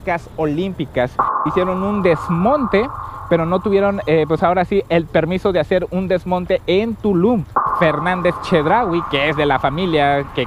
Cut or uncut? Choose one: cut